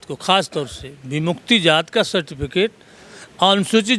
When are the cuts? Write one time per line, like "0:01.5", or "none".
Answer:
none